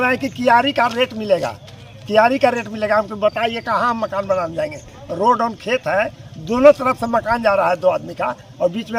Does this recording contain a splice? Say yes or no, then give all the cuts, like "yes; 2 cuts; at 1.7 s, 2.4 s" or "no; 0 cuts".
no; 0 cuts